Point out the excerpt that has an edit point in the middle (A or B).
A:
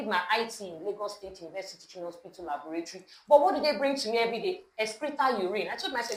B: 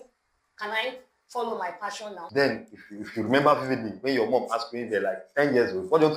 B